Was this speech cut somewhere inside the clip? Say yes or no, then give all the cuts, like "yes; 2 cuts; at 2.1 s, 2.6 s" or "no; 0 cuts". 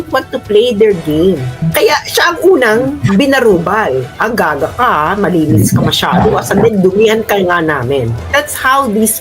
yes; 2 cuts; at 1.7 s, 8.2 s